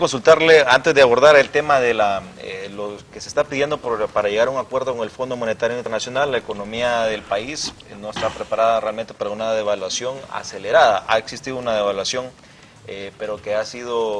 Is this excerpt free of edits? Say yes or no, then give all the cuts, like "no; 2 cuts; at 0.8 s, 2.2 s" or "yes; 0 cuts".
no; 1 cut; at 9.1 s